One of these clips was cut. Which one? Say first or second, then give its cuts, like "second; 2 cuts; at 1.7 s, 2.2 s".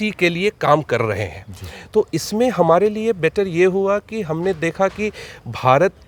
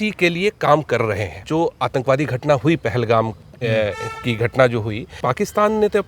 second; 2 cuts; at 1.4 s, 5.1 s